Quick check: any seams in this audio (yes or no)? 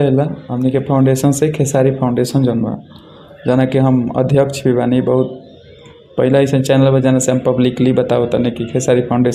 no